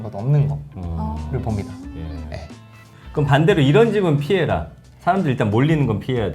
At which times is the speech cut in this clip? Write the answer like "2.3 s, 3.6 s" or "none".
2.8 s